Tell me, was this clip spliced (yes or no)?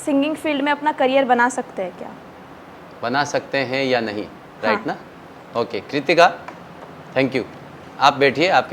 no